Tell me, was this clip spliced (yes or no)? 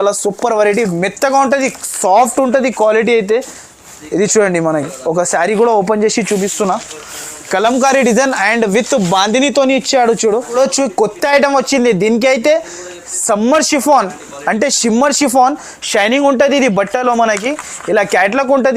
yes